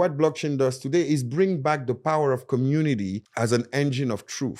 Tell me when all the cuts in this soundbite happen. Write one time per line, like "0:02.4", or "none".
0:03.2